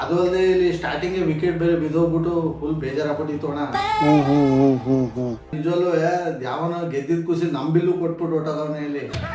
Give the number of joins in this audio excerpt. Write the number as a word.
one